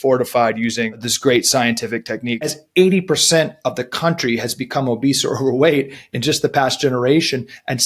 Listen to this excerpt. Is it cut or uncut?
cut